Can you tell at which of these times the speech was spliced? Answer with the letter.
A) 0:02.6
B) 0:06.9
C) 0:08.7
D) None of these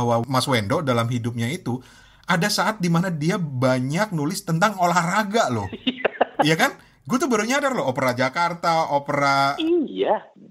D